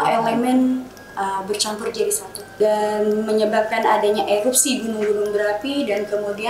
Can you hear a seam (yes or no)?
yes